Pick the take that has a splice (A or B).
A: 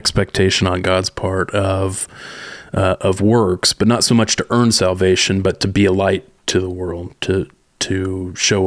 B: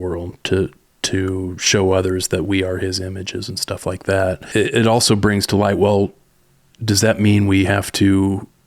B